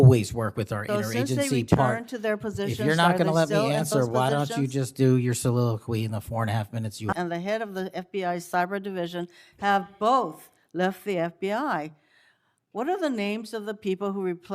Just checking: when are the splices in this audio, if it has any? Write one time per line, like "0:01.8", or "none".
0:07.1